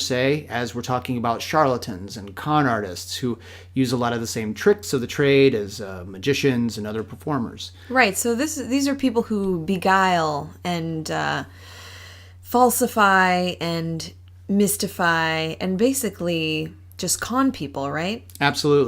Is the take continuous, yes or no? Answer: no